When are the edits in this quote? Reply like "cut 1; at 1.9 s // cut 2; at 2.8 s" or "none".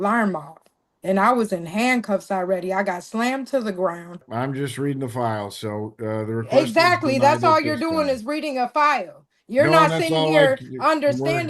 cut 1; at 4.2 s